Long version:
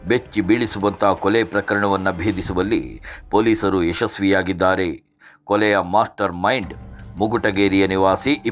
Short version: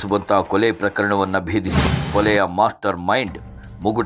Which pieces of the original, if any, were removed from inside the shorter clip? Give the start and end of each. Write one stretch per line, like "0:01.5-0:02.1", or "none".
0:02.5-0:05.1